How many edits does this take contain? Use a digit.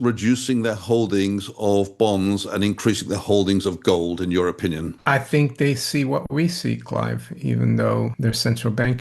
2